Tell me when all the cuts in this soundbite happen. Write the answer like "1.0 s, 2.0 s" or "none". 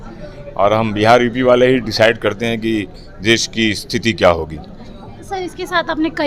none